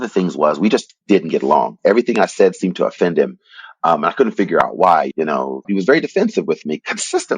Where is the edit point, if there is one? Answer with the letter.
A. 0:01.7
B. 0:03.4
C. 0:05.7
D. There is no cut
C